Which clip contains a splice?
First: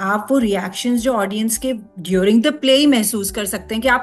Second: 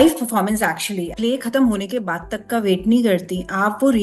second; 1 cut; at 1.1 s

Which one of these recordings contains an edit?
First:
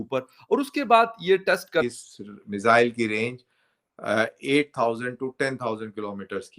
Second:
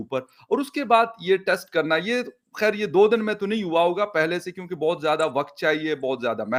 first; 1 cut; at 1.8 s

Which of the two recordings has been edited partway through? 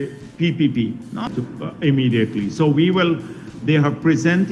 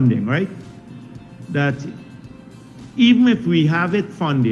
first; 1 cut; at 1.3 s

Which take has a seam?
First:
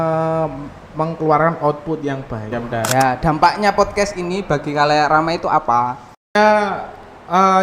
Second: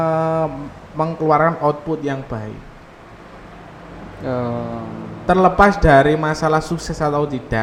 first; 1 cut; at 2.5 s

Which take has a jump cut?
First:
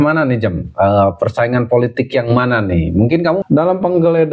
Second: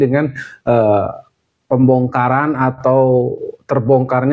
first; 1 cut; at 3.4 s

